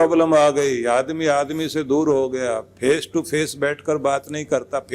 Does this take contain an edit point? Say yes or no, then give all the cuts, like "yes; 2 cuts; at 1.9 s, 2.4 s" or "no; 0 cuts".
no; 0 cuts